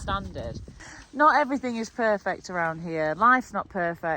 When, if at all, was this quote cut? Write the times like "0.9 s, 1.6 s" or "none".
1.0 s